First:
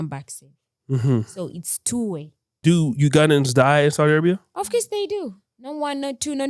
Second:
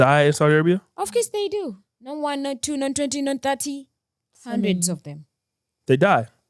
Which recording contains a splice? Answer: first; 1 cut; at 2.4 s

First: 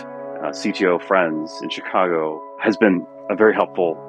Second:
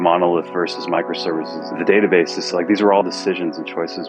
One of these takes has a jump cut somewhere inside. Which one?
first; 1 cut; at 2.5 s

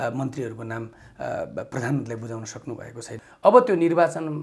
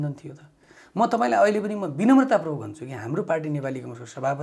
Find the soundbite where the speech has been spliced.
first; 1 cut; at 3.3 s

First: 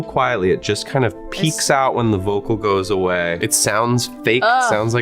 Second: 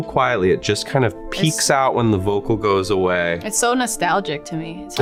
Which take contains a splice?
first; 1 cut; at 3.4 s

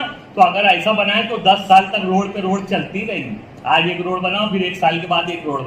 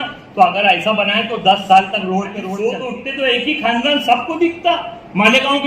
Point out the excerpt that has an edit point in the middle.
second; 1 cut; at 2.5 s

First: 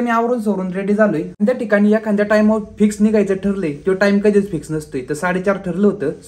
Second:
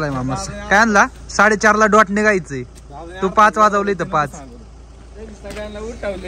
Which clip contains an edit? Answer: first; 1 cut; at 1.3 s

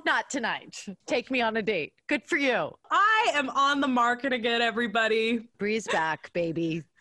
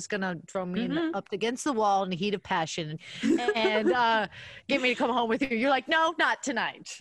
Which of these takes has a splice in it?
second; 1 cut; at 3.0 s

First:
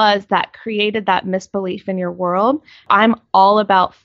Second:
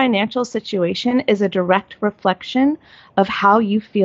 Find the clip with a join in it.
first; 1 cut; at 2.9 s

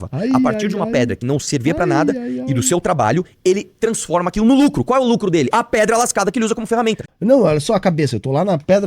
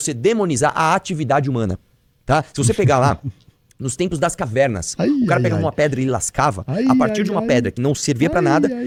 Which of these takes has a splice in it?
first; 1 cut; at 7.1 s

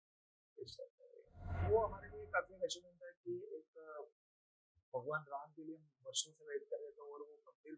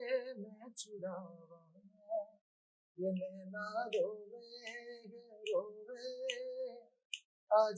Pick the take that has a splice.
first; 1 cut; at 1.6 s

